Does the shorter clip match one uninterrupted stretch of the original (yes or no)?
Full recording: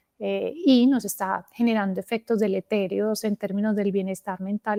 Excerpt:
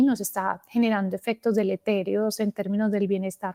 yes